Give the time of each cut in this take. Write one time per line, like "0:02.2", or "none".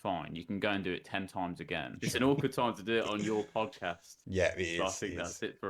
0:01.9